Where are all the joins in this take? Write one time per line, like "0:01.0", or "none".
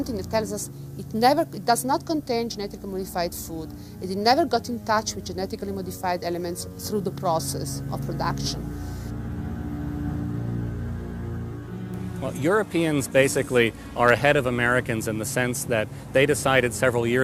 0:06.1